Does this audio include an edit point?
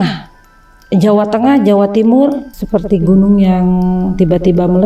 yes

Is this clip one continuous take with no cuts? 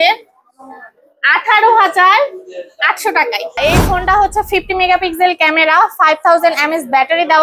no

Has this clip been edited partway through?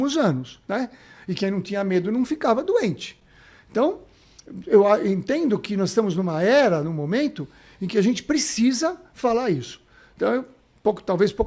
no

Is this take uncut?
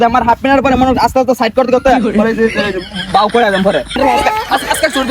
no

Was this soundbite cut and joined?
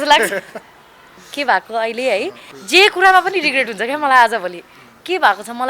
yes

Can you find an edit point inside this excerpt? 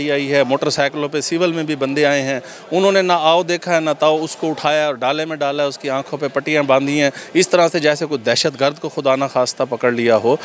no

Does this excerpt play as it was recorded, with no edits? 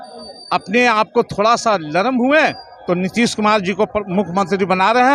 yes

